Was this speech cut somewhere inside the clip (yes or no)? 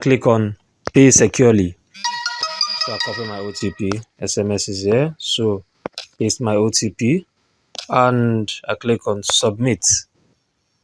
yes